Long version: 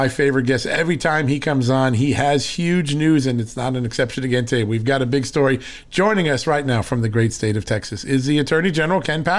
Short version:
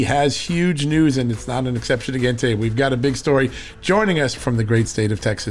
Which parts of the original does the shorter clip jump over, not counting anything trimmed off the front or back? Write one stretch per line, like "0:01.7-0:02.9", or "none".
0:06.4-0:06.8